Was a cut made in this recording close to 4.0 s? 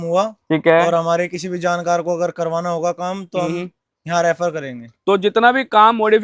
no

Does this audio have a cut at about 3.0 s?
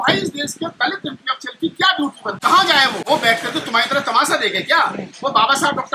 yes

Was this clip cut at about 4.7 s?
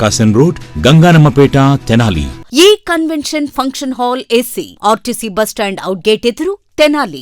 no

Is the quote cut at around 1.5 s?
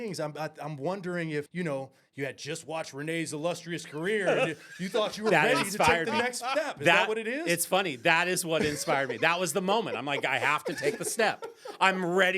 yes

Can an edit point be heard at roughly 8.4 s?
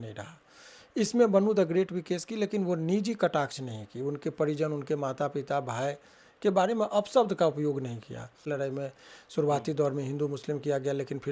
yes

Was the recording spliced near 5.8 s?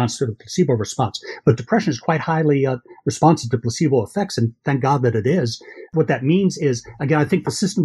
yes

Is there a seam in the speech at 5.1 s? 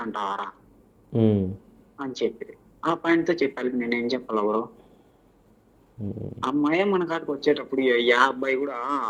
no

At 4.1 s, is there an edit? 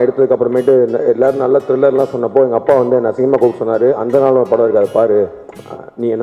no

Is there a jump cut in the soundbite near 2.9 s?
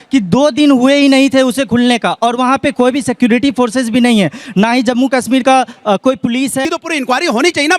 no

